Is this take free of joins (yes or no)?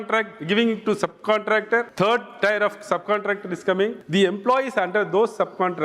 no